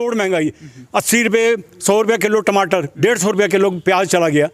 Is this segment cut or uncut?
uncut